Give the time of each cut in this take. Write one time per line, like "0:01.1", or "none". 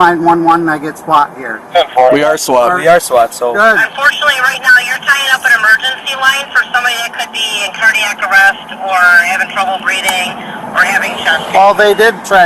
0:03.9